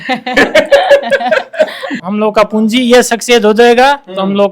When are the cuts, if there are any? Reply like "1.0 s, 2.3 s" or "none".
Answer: 1.9 s